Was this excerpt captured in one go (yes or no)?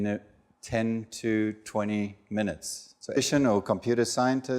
yes